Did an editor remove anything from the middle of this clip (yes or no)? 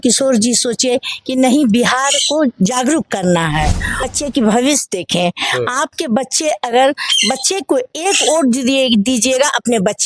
yes